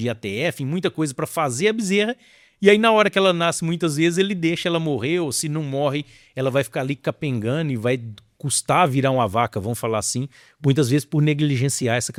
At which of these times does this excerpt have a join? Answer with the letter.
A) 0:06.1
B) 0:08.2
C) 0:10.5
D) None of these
D